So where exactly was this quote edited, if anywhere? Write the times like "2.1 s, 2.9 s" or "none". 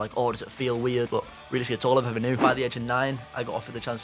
1.1 s, 2.4 s